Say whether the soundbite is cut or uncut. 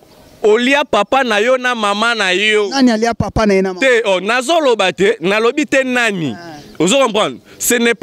uncut